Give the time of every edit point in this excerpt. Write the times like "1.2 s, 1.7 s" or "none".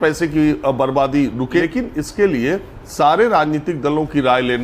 1.6 s